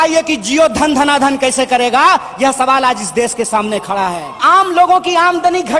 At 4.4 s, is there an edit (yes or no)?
yes